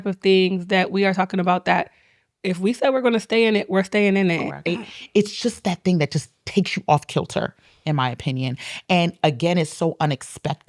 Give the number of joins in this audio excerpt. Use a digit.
1